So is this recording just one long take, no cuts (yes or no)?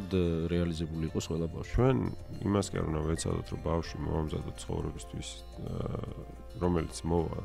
no